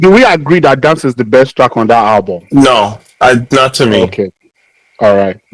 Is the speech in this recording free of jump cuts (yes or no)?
yes